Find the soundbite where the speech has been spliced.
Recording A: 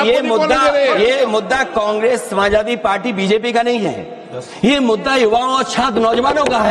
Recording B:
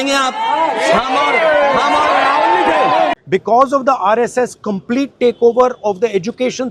B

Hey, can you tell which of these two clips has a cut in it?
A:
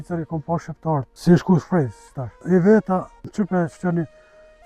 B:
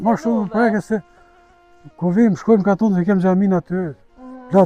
A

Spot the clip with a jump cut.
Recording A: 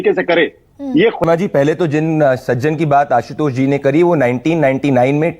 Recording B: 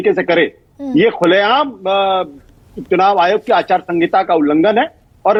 A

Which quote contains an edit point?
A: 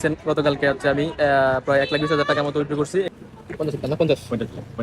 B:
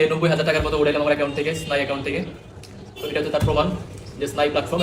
A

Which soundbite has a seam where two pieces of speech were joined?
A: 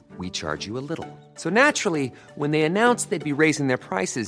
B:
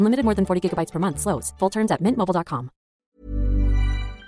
B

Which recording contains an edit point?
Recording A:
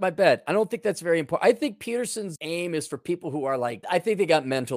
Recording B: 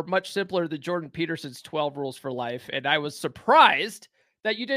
A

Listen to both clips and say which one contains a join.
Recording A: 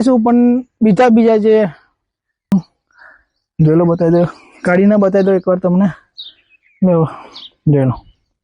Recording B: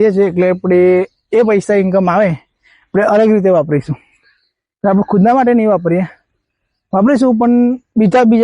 A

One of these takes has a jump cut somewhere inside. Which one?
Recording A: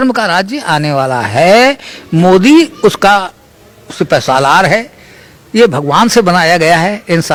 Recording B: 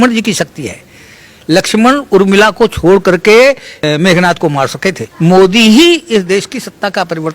B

